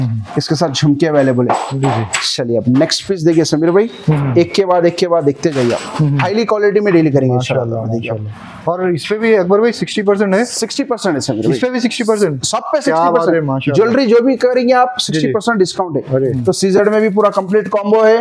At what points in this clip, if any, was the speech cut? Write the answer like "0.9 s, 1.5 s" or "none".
6.2 s, 16.3 s